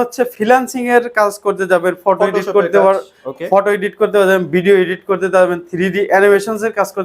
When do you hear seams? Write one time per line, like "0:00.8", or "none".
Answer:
none